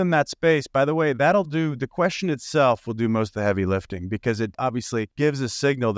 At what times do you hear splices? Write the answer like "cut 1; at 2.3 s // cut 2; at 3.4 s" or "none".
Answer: cut 1; at 4.7 s